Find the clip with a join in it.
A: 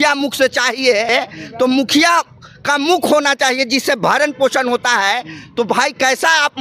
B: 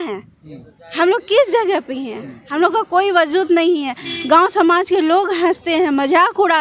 A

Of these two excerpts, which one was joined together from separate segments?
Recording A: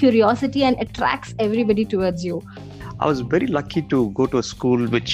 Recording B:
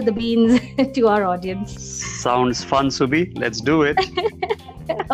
A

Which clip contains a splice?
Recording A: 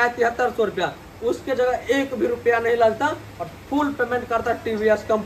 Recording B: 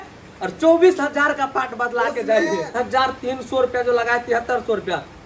B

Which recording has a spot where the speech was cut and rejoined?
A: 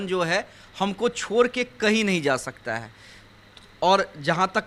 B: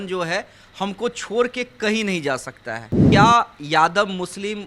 B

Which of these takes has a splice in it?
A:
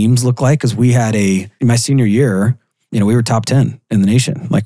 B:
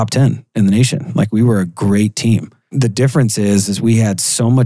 B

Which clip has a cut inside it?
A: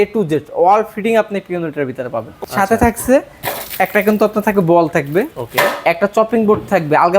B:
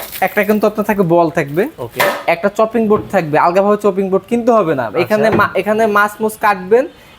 A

